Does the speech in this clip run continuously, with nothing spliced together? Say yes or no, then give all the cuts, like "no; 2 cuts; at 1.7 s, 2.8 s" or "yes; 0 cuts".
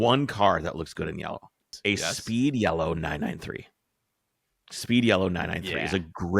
no; 1 cut; at 1.7 s